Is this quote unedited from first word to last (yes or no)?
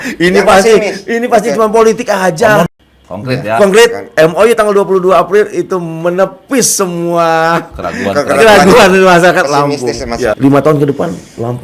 no